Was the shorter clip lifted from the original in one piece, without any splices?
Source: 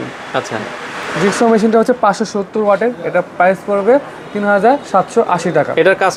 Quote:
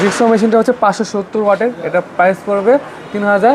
yes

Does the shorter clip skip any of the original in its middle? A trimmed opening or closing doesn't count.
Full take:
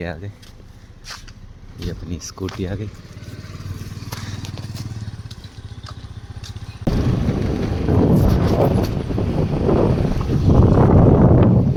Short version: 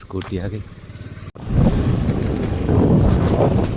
yes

